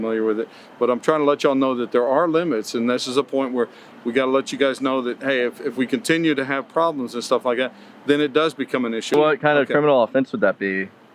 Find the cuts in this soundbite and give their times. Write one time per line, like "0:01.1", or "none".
0:09.1